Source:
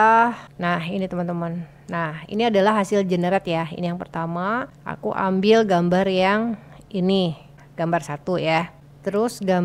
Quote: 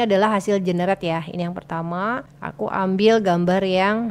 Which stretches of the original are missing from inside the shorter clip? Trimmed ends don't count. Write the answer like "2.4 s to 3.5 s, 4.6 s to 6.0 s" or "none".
none